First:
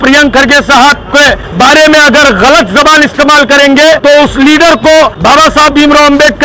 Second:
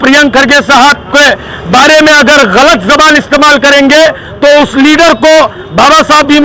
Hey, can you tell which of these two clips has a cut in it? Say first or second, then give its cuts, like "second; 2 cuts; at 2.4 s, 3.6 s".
first; 3 cuts; at 1.4 s, 4.0 s, 5.2 s